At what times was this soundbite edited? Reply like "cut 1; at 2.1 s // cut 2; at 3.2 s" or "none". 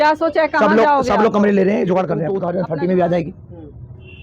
cut 1; at 2.3 s

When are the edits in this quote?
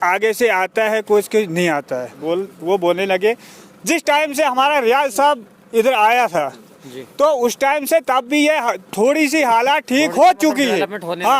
cut 1; at 2.1 s

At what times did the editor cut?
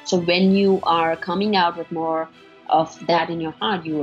none

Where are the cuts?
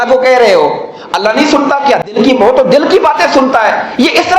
none

